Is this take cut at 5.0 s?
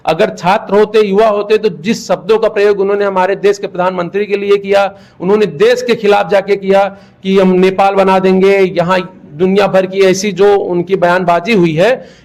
no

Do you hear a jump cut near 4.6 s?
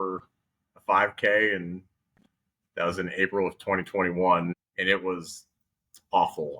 yes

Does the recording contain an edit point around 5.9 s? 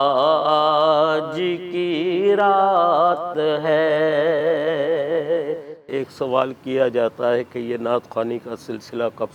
yes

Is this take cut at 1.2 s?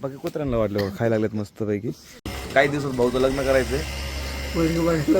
no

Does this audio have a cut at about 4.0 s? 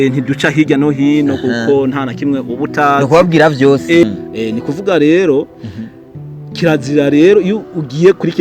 yes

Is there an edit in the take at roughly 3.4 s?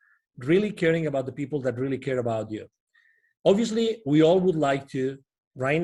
no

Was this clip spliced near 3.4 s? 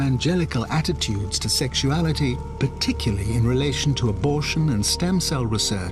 no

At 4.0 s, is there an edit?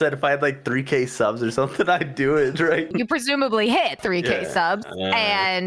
yes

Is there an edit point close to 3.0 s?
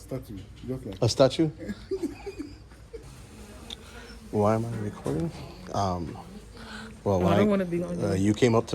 yes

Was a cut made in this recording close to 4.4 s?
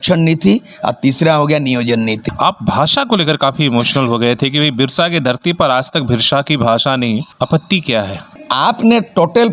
no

